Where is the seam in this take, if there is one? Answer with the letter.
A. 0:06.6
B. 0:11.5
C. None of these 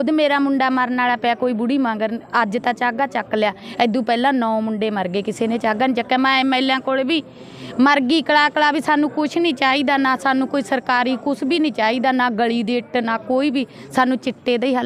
C